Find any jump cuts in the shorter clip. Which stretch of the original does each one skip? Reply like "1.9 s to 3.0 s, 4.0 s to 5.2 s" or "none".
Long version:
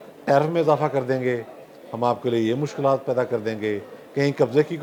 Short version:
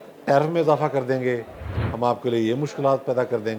none